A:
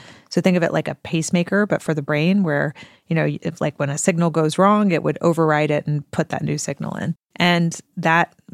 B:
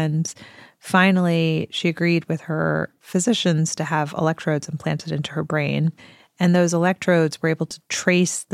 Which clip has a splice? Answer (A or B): A